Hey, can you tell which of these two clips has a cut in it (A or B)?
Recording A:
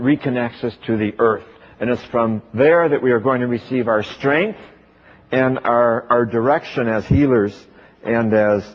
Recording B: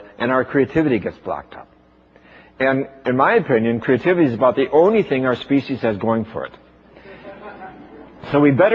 B